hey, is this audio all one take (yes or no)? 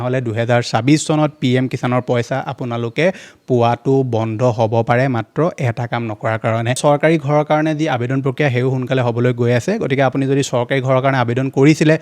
no